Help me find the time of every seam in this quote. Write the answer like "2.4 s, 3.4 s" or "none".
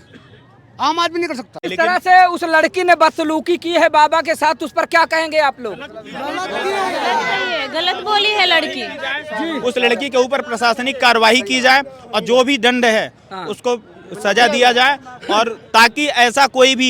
1.7 s